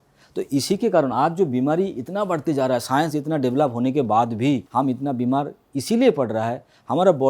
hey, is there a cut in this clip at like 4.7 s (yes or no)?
yes